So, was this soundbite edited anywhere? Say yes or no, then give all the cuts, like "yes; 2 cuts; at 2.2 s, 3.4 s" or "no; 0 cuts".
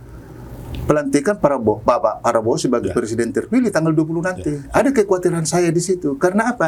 no; 0 cuts